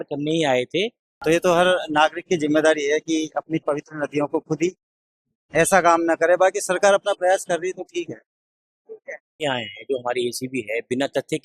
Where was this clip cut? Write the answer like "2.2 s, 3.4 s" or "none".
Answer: 1.0 s, 9.3 s